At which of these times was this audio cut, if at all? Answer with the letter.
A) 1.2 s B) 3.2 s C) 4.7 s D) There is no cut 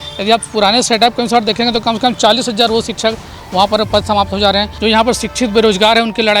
C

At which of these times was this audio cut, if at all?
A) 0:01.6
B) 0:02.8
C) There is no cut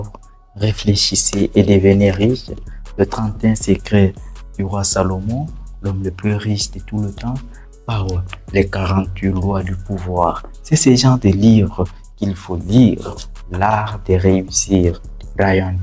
C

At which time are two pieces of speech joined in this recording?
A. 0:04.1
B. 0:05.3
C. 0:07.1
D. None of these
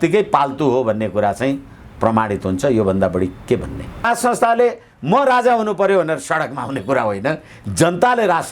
A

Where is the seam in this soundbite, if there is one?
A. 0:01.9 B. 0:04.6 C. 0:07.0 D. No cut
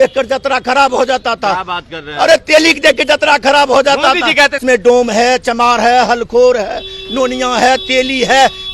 B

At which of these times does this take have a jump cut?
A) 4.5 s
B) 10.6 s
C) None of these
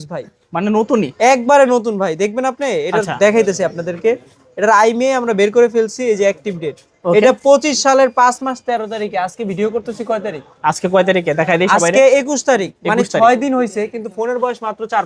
C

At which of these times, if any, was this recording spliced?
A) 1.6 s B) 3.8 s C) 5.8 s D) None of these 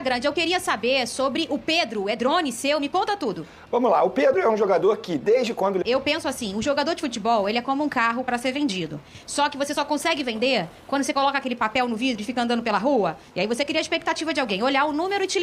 C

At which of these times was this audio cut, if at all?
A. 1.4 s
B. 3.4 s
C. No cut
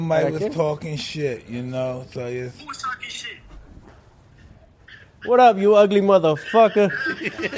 B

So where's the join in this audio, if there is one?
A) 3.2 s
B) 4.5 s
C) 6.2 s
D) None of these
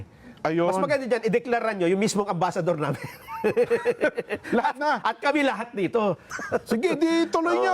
C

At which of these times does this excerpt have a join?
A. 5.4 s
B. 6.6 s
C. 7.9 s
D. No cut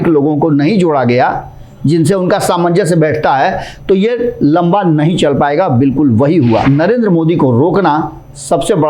B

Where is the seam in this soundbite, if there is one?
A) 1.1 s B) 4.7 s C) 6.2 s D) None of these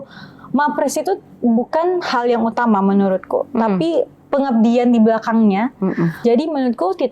C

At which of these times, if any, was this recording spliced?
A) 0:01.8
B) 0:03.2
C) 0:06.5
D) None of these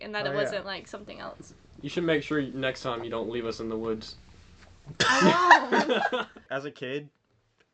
C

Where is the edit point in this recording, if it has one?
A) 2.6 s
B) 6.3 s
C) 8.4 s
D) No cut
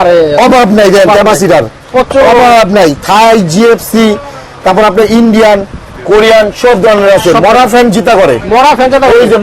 D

